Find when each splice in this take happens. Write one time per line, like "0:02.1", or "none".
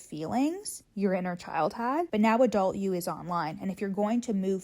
0:02.1

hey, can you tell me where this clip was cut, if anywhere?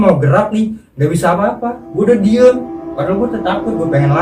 none

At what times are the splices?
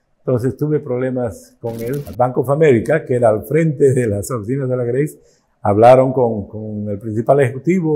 0:02.0

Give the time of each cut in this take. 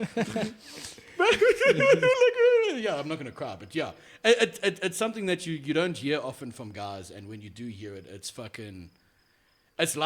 none

